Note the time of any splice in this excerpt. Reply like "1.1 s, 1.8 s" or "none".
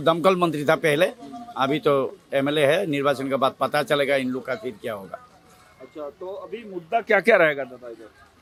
none

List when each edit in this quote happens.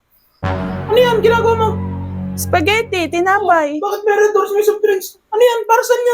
none

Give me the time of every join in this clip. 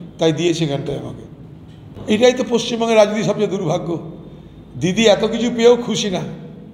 1.9 s

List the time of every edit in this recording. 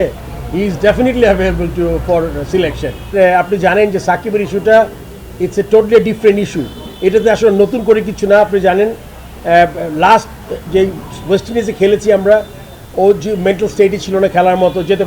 3.1 s

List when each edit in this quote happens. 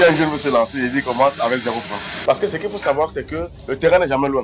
2.3 s

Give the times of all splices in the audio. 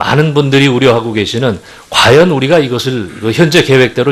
1.3 s

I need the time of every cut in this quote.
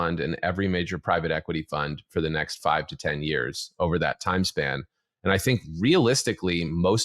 none

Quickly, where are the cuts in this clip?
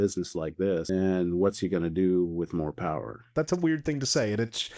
0.9 s, 3.2 s

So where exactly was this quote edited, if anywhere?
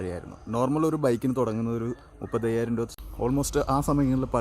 2.9 s

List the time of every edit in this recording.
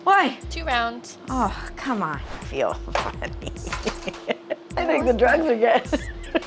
2.3 s, 4.7 s

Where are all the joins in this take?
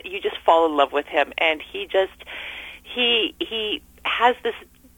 none

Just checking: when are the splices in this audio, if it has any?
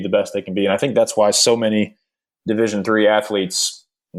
none

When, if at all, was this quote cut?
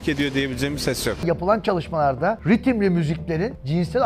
1.2 s

